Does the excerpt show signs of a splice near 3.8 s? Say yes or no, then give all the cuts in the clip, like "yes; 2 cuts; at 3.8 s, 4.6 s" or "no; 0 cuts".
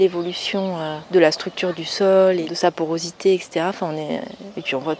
no; 2 cuts; at 0.9 s, 2.5 s